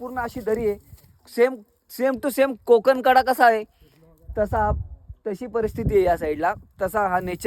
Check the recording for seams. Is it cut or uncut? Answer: uncut